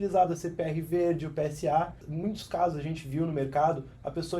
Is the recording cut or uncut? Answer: cut